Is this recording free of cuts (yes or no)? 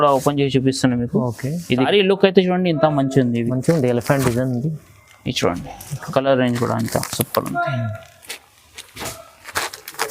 no